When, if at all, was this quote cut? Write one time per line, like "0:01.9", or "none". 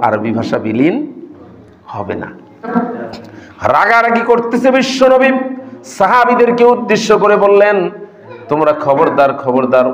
0:02.7

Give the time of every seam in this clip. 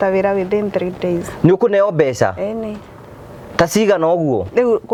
none

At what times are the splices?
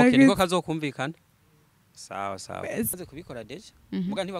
0:02.9

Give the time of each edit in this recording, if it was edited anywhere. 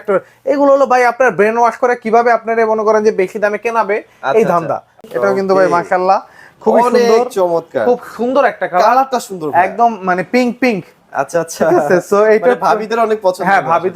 0:05.0

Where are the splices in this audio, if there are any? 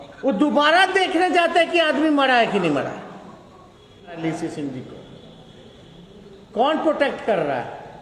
0:04.2

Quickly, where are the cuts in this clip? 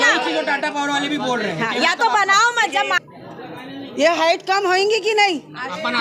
0:03.0

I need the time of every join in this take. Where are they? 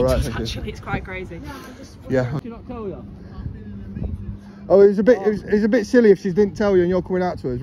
0:02.4

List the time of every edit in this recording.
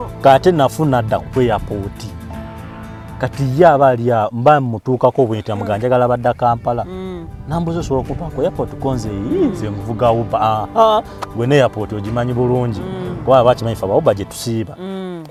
none

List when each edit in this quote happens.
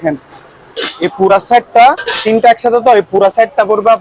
none

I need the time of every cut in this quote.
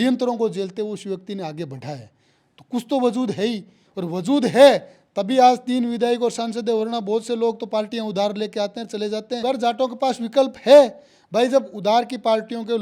0:09.4

